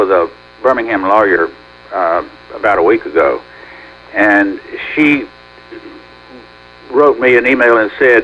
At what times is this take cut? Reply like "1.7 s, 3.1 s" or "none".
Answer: none